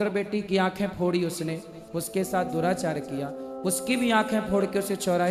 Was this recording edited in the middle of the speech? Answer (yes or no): no